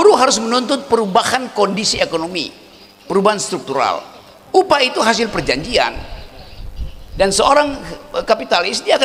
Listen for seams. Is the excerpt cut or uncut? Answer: uncut